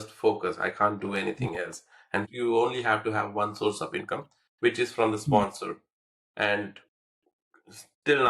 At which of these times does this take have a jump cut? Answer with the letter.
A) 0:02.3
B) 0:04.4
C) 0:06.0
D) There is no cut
A